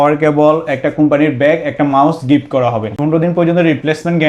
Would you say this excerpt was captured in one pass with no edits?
no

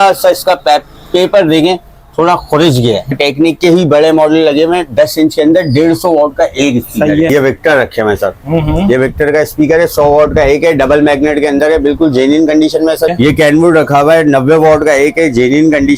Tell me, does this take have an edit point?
yes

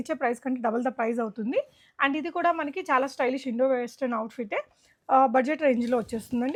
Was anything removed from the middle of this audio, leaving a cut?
no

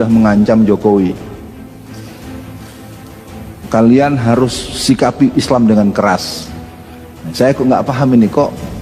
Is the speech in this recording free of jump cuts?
yes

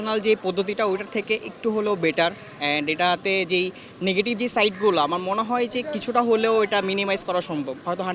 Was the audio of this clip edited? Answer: no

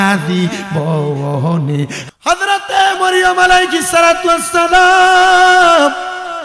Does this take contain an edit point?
yes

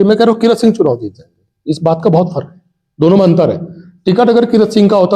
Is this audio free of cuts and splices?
yes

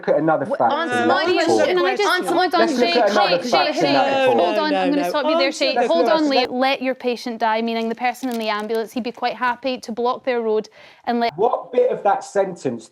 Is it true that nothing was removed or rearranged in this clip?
no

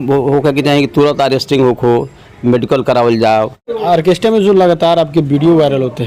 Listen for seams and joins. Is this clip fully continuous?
no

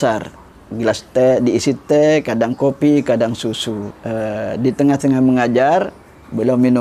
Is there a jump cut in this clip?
yes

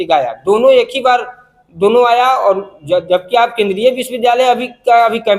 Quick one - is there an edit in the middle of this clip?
no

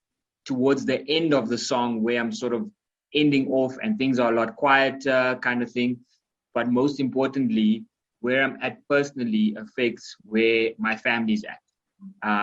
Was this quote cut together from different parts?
yes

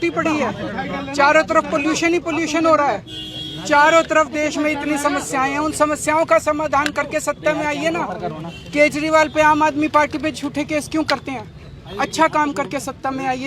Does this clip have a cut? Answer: no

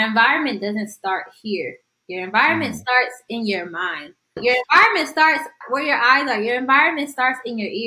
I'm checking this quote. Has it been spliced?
yes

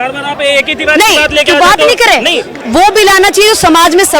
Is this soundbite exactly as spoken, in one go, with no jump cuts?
no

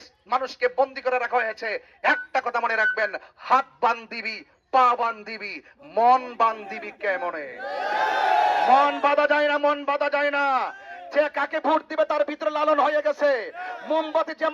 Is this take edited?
no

